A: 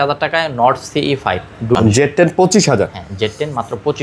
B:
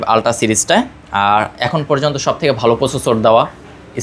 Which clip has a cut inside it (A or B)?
A